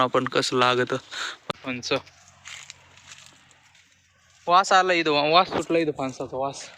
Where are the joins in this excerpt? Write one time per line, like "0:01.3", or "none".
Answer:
0:01.5